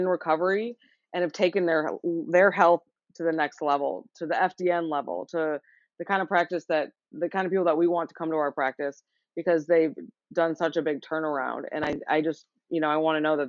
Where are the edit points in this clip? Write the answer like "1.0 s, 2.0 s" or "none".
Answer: none

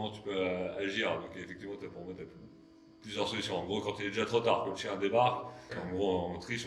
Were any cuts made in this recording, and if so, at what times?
5.7 s

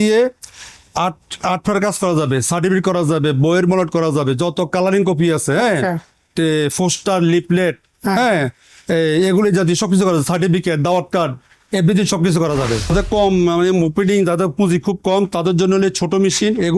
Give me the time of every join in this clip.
12.9 s

